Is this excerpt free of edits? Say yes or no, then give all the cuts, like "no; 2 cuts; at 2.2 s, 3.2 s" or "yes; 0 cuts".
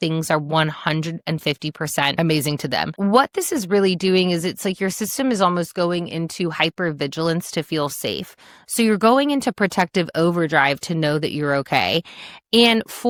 yes; 0 cuts